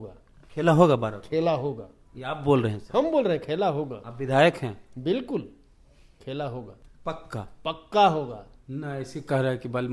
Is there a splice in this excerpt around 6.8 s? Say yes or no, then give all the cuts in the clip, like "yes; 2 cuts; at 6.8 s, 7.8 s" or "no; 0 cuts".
yes; 1 cut; at 6.8 s